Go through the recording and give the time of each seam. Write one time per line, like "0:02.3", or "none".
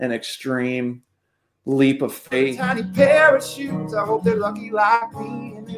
0:02.7